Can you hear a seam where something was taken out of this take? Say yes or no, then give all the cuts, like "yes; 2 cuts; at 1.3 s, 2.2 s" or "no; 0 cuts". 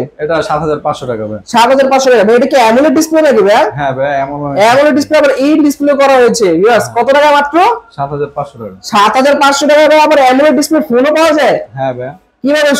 no; 0 cuts